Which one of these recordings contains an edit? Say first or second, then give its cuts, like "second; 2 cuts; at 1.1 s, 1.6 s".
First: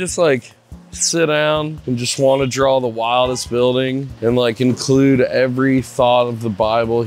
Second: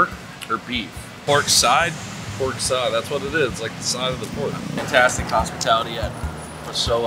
second; 1 cut; at 4.8 s